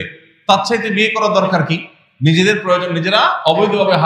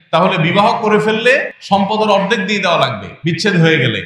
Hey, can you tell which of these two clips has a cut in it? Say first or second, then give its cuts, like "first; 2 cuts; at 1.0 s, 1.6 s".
second; 2 cuts; at 1.5 s, 3.1 s